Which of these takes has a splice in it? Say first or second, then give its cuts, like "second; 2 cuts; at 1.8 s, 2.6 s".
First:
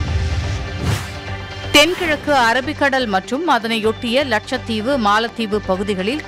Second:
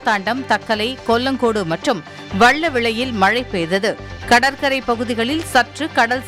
first; 1 cut; at 1.5 s